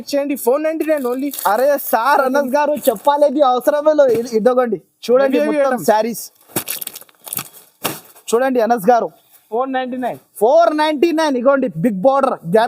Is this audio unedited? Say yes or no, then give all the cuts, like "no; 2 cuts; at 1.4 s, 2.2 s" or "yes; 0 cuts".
yes; 0 cuts